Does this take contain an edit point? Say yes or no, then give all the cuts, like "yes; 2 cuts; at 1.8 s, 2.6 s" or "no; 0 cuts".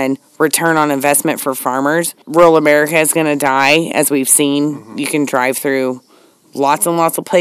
yes; 1 cut; at 2.2 s